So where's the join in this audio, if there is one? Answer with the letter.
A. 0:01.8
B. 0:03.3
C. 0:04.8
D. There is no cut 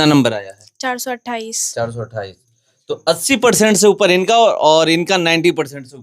D